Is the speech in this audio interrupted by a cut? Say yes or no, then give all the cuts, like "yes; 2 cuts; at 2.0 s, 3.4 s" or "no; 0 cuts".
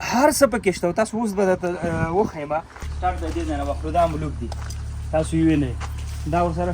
yes; 1 cut; at 2.8 s